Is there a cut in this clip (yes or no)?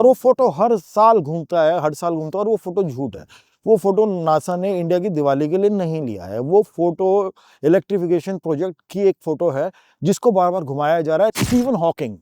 yes